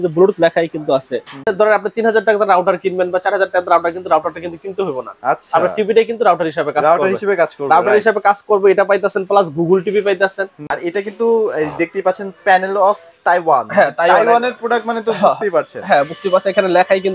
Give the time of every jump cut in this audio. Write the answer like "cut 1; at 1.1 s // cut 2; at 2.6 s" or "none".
cut 1; at 1.5 s // cut 2; at 10.8 s